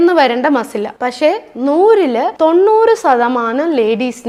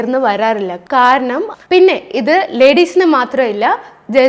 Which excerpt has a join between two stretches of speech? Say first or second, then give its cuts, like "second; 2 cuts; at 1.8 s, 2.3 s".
second; 1 cut; at 1.5 s